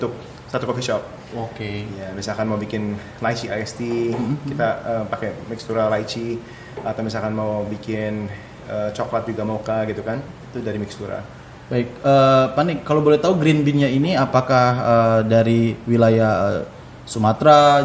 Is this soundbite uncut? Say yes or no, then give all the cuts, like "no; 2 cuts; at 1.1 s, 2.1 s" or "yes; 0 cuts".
yes; 0 cuts